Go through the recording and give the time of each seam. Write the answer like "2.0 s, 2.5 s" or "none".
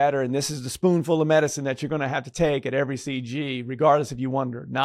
none